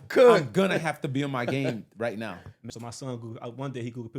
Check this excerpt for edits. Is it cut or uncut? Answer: cut